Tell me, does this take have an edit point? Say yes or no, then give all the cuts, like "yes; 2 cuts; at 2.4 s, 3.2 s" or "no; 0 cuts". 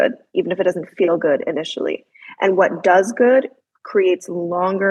no; 0 cuts